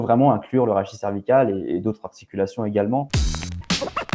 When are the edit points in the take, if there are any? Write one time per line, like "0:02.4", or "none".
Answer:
0:03.1